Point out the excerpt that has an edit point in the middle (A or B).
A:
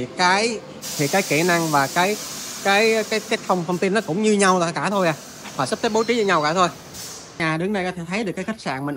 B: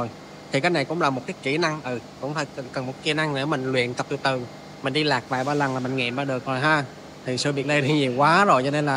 A